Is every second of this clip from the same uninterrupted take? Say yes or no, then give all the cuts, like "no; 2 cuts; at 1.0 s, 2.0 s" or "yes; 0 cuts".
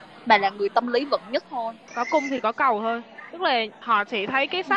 no; 2 cuts; at 1.9 s, 3.8 s